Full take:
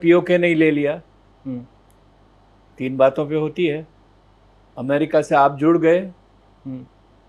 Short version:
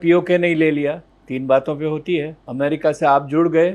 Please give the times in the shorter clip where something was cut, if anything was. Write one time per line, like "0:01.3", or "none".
0:01.1
0:02.4